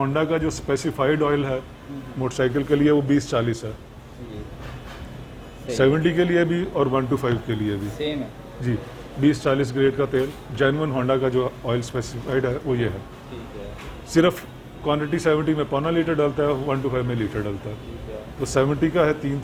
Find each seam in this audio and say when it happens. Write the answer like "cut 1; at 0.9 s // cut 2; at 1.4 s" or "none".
none